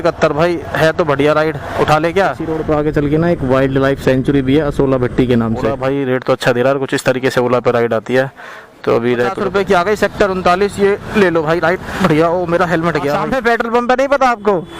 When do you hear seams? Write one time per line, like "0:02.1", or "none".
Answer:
0:02.5
0:05.7
0:09.4
0:13.2